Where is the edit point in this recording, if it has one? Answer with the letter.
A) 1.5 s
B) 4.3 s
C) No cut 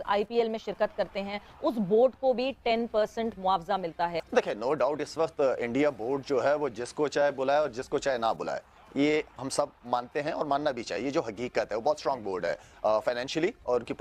B